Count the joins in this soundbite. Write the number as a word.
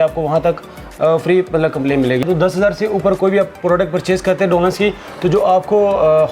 one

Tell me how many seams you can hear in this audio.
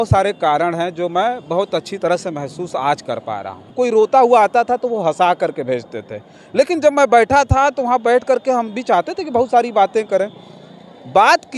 one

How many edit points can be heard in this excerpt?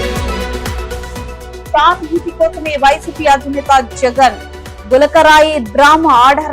one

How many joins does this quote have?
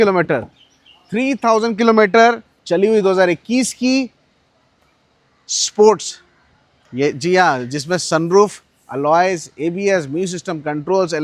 zero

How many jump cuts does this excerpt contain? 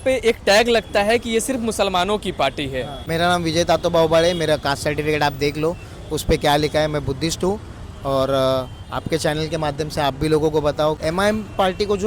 two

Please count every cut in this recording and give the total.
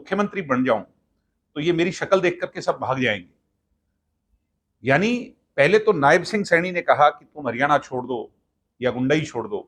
zero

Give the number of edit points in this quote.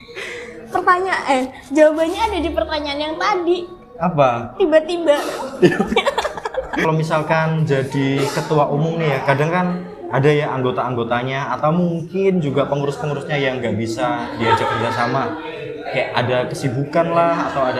one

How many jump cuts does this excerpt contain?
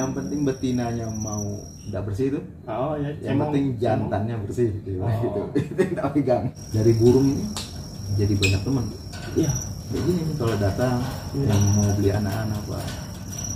three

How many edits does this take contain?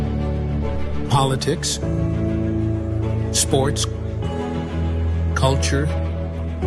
zero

